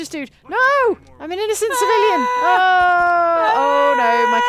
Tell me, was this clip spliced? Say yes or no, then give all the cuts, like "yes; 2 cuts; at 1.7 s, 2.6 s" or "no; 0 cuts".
yes; 1 cut; at 1.2 s